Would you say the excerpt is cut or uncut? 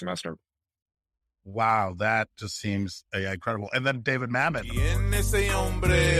cut